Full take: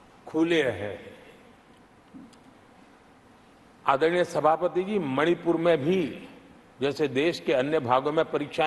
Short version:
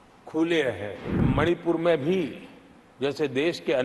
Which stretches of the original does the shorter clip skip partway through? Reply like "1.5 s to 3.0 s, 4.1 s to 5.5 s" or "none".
1.3 s to 5.1 s